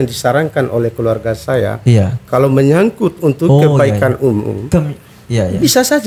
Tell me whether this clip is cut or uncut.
uncut